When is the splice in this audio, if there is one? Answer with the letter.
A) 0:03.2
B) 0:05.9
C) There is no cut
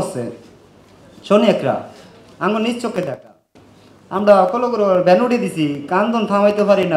C